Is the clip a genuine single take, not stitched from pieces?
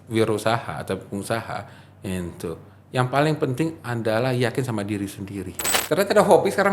no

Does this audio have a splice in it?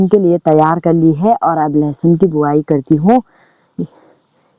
no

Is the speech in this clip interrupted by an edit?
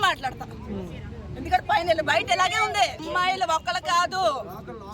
yes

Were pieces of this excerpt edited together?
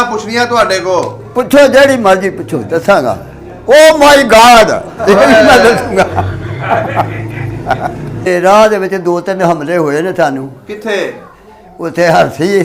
yes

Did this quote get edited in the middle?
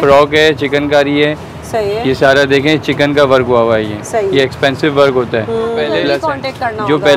yes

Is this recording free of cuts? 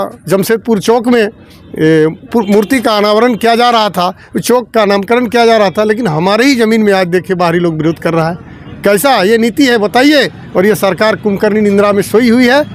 yes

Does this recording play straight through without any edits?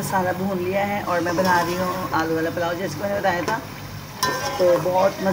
yes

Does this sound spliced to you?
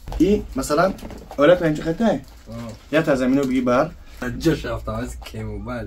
yes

